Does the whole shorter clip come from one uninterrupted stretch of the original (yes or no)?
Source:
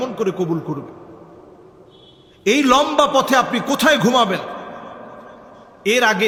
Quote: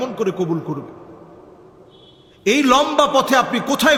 yes